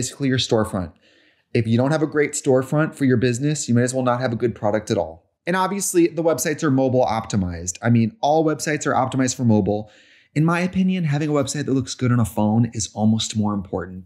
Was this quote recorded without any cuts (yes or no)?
no